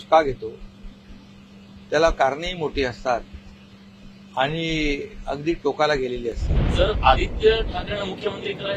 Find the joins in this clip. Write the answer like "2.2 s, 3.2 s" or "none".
6.6 s